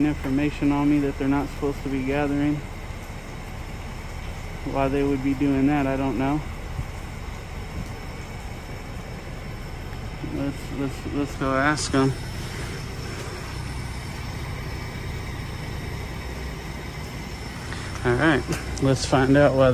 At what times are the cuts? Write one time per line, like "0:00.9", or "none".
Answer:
none